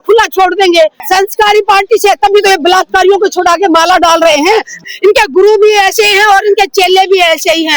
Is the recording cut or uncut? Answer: cut